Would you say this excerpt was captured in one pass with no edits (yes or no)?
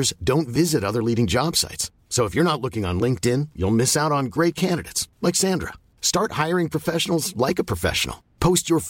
yes